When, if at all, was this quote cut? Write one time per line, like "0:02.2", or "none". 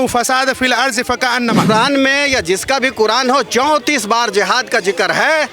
0:01.7